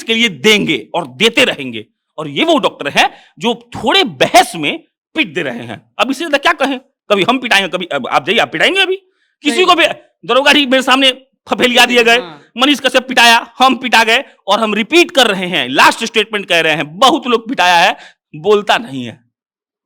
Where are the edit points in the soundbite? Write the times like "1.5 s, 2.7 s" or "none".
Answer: none